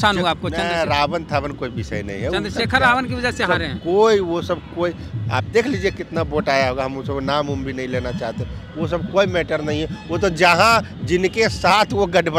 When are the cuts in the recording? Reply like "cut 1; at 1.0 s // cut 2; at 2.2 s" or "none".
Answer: none